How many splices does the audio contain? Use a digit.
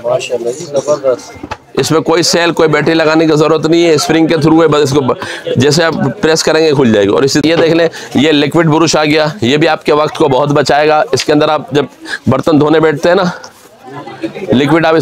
1